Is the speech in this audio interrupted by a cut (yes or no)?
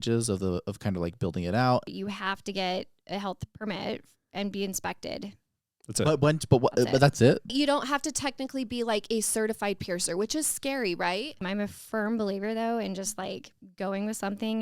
yes